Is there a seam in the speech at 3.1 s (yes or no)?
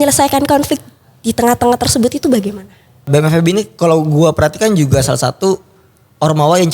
yes